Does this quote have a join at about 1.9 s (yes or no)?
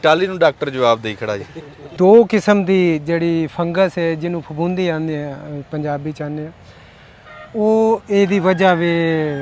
yes